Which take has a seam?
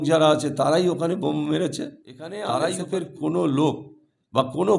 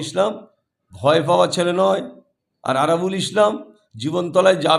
first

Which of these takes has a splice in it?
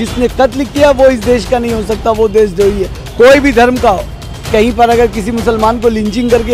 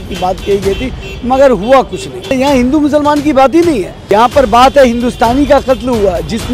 second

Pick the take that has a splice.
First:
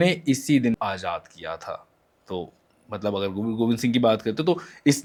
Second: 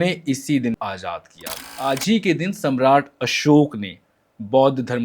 second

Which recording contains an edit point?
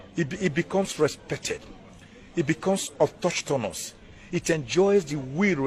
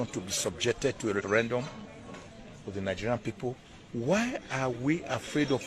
second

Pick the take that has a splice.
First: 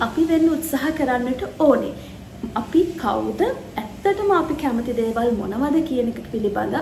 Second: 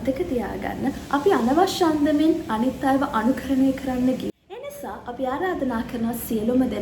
second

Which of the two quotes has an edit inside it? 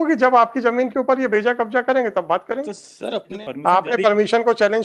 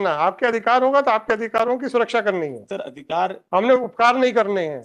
first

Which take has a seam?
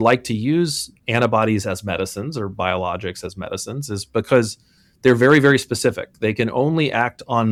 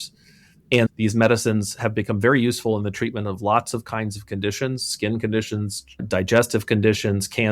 second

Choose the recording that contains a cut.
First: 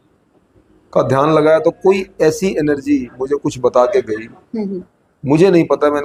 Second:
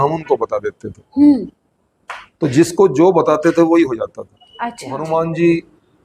second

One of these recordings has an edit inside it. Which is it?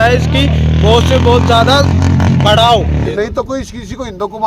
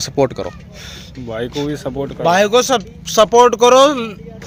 first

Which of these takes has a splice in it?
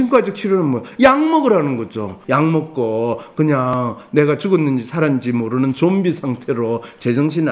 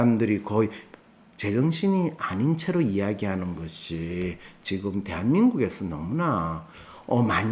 first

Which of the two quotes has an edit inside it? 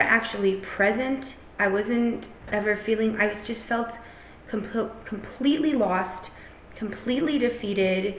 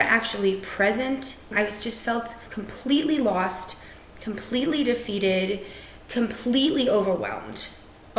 second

